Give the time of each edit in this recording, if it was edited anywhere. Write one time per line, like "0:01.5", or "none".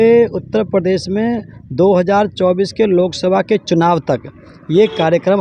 none